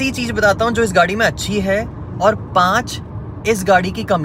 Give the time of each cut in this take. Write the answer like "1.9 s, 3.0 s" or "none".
none